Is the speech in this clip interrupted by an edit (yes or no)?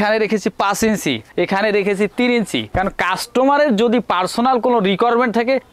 no